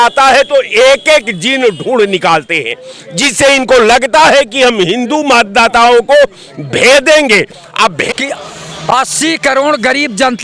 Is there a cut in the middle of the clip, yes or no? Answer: yes